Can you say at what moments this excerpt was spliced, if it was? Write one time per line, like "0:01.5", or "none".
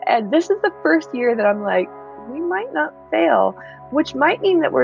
none